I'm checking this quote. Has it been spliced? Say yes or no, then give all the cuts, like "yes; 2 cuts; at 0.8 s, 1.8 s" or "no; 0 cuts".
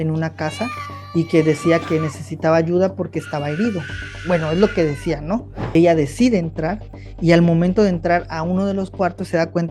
yes; 1 cut; at 5.8 s